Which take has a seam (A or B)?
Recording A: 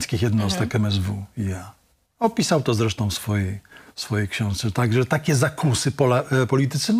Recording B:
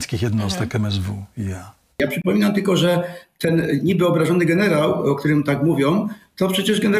B